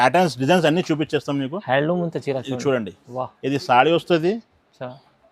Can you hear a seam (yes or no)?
no